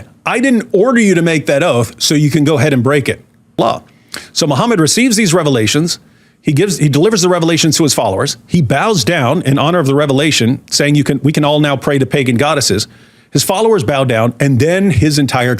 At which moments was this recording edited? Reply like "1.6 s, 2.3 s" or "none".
3.6 s